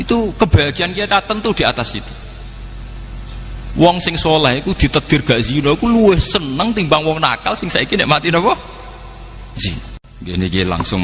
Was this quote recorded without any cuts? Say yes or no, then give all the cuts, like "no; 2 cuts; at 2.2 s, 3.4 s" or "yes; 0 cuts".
no; 1 cut; at 10.0 s